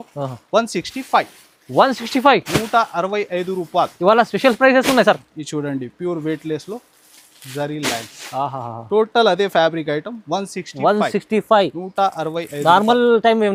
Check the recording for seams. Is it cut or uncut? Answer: uncut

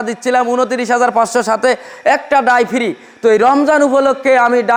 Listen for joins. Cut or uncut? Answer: uncut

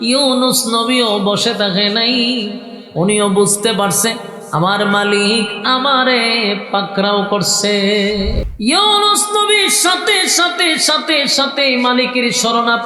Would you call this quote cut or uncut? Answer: cut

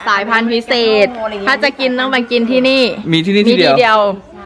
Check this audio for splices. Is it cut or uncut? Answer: uncut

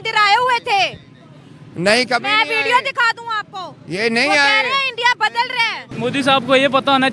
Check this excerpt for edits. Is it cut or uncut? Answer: cut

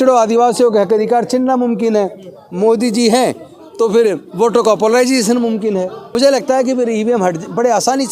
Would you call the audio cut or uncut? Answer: cut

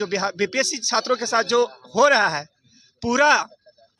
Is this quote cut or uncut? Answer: uncut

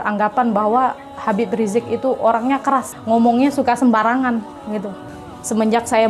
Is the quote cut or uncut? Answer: cut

